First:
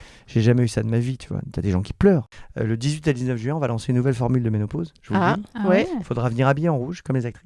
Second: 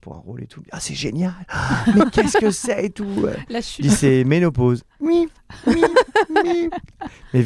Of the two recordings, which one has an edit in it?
first; 1 cut; at 2.4 s

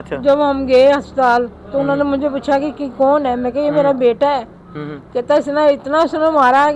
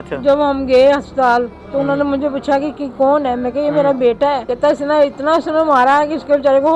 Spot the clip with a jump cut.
second; 1 cut; at 4.5 s

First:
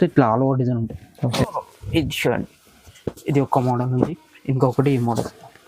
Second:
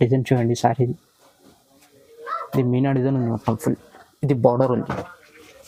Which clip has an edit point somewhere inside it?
first; 1 cut; at 1.5 s

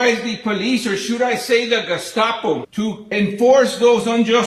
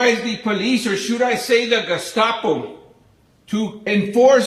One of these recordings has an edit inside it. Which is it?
first; 1 cut; at 2.7 s

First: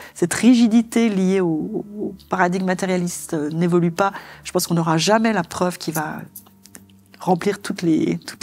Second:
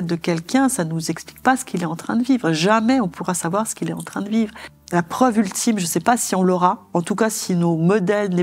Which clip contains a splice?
second; 1 cut; at 4.7 s

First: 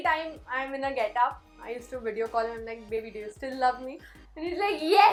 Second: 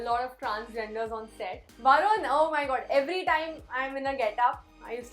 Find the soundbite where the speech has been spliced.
second; 1 cut; at 1.7 s

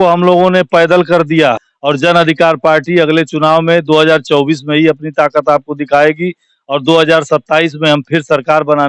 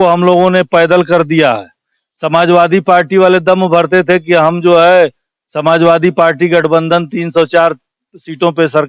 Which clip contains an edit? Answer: first; 1 cut; at 1.7 s

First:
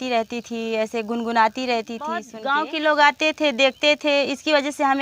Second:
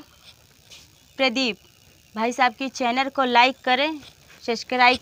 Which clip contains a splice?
first; 1 cut; at 2.4 s

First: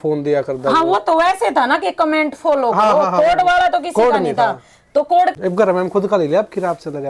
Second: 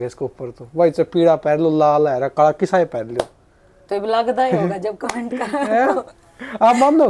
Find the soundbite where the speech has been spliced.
first; 1 cut; at 5.3 s

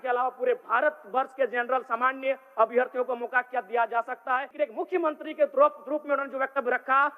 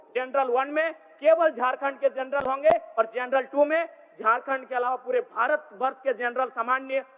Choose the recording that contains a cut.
first; 1 cut; at 4.5 s

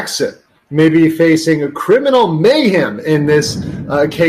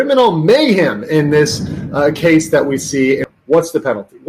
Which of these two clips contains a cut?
second; 1 cut; at 3.3 s

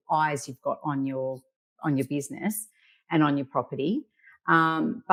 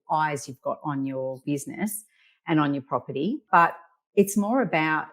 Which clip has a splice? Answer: second; 2 cuts; at 1.4 s, 3.4 s

